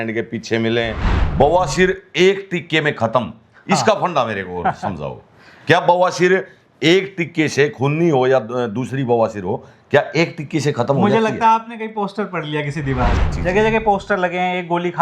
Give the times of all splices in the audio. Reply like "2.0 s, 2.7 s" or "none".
1.1 s, 13.2 s